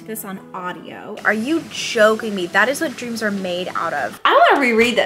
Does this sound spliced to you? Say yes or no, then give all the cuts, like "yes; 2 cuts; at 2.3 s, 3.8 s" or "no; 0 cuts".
yes; 2 cuts; at 1.2 s, 4.1 s